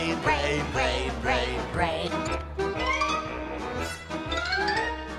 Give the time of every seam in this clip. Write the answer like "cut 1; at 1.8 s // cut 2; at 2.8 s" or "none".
cut 1; at 3.6 s